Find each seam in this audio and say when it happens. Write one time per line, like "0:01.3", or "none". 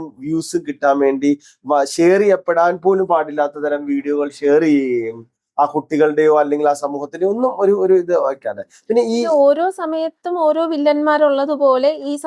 none